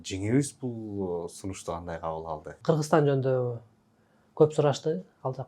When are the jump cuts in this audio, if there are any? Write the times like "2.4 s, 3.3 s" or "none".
2.6 s